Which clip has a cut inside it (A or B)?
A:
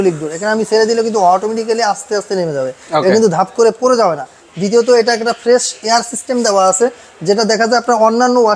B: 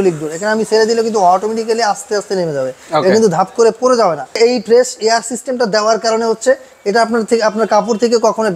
B